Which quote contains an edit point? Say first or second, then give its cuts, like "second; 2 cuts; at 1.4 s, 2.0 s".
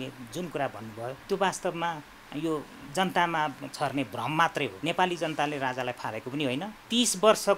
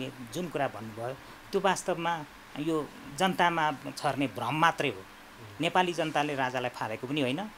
first; 3 cuts; at 1.2 s, 4.8 s, 6.8 s